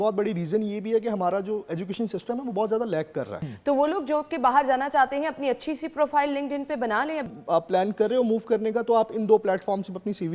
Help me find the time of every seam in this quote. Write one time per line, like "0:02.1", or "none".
0:03.4
0:07.3